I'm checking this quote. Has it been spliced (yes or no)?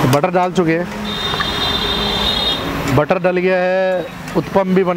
no